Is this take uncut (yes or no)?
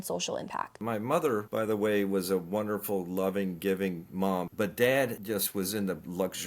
no